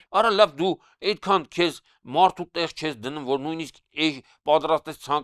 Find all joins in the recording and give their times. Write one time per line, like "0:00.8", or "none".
none